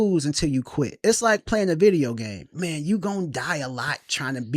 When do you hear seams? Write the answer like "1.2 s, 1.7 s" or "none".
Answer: 0.9 s, 2.5 s